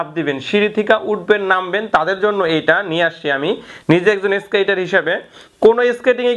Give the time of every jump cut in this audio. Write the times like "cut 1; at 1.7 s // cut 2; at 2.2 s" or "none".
none